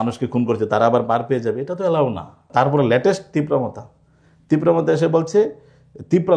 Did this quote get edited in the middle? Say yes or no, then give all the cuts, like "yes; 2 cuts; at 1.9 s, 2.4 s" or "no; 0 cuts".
yes; 1 cut; at 2.5 s